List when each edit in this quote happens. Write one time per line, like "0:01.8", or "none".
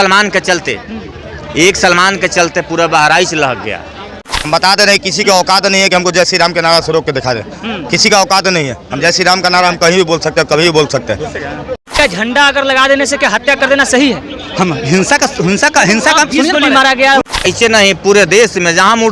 0:04.3
0:11.9
0:17.4